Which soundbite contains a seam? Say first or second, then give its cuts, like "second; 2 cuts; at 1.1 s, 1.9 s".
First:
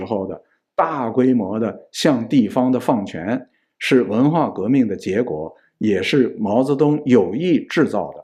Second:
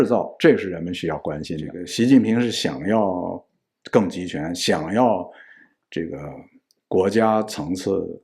second; 1 cut; at 1.8 s